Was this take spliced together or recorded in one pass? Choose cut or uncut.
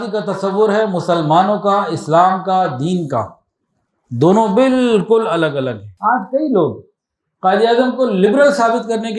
cut